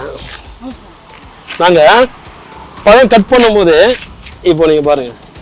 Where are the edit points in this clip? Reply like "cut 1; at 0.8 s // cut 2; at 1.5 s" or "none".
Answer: none